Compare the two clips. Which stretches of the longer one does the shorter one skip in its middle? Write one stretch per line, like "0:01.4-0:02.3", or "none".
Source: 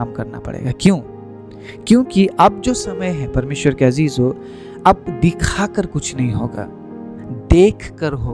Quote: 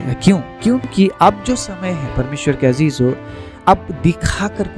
0:01.5-0:02.1